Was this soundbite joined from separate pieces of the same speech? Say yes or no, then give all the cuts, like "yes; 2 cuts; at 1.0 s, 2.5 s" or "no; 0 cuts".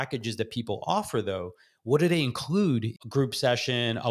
yes; 1 cut; at 2.9 s